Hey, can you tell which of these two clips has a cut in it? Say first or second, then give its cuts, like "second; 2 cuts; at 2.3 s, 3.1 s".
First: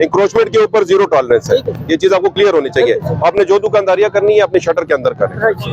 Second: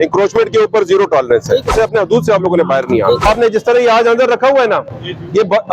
second; 2 cuts; at 1.7 s, 3.3 s